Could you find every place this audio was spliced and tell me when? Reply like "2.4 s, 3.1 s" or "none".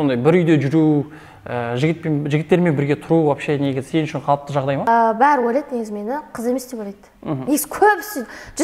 4.9 s